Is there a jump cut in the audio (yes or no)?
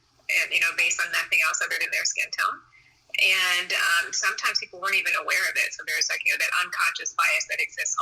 no